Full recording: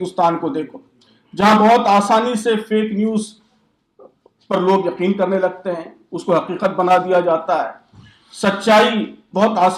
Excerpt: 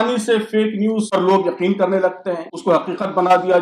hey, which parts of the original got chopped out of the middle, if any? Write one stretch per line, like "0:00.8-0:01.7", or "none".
0:03.2-0:04.5
0:05.9-0:06.1